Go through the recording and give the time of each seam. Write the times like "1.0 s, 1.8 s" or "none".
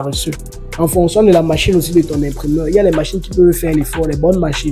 none